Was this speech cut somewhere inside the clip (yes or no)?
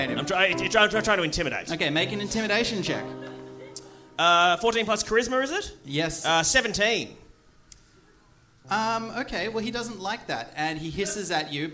no